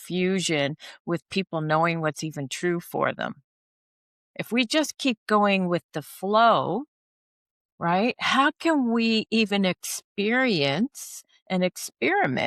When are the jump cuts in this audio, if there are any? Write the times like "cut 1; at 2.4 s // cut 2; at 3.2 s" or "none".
none

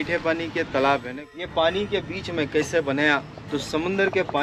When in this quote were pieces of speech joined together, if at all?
cut 1; at 1.2 s

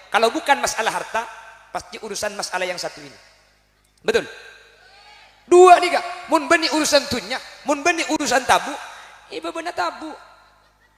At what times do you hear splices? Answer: none

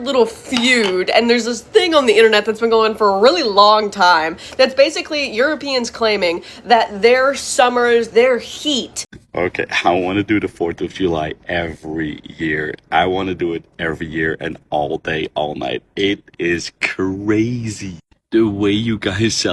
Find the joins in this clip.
cut 1; at 9.1 s

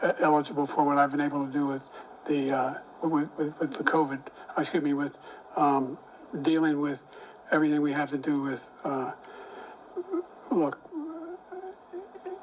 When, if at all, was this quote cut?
none

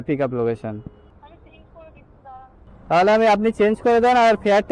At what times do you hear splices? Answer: cut 1; at 2.7 s

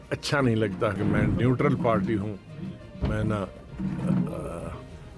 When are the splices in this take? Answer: cut 1; at 0.9 s

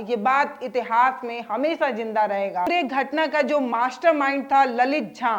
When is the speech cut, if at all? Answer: cut 1; at 2.7 s

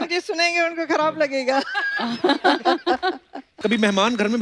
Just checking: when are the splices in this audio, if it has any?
cut 1; at 3.5 s

